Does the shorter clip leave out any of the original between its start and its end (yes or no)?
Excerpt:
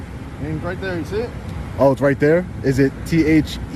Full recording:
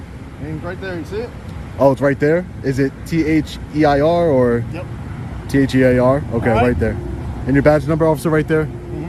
no